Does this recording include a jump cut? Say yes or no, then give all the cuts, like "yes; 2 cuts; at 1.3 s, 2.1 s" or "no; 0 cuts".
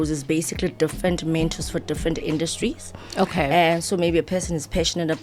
no; 0 cuts